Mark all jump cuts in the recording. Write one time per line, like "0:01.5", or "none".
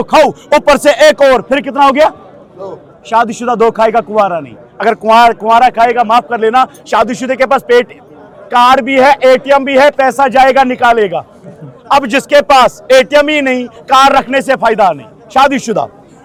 none